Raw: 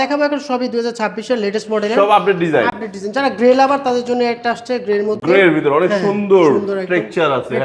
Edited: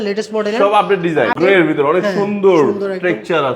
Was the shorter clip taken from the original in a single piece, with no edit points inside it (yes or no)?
no